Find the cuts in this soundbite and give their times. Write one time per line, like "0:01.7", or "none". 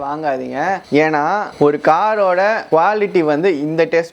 0:02.6

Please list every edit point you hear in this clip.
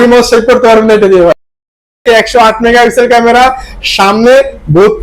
0:02.0

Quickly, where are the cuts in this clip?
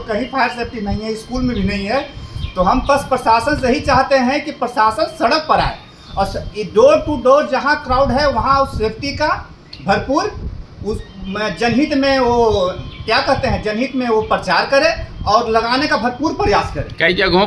none

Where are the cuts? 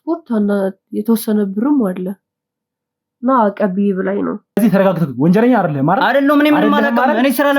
0:04.6

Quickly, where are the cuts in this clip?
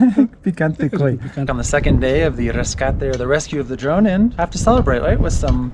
0:01.5
0:04.4

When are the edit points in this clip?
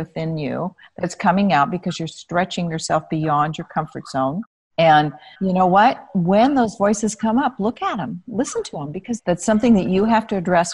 0:09.1

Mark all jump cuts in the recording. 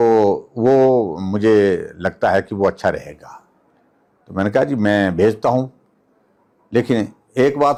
none

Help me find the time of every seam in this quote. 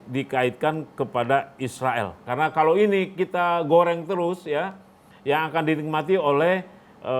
0:02.3

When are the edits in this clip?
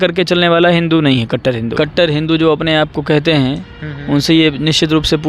0:01.7

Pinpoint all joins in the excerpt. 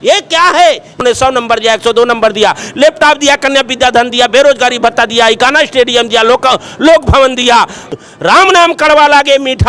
0:01.0
0:07.8

